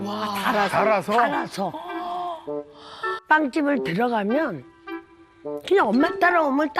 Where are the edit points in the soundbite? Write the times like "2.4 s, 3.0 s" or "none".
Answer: 3.2 s